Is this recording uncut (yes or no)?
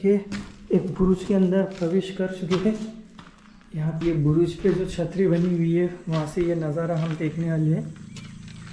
no